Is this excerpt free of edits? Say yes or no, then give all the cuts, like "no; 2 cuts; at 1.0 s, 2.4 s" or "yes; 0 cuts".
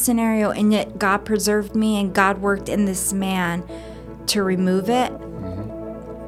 yes; 0 cuts